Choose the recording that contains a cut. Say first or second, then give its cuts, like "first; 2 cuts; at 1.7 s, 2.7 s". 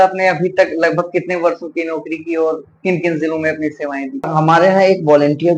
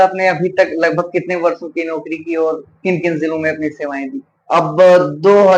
first; 1 cut; at 4.3 s